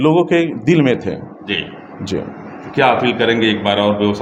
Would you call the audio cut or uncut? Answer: uncut